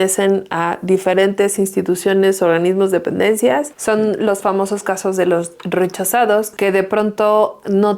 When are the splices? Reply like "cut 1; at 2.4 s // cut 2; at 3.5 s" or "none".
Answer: cut 1; at 3.7 s // cut 2; at 6.5 s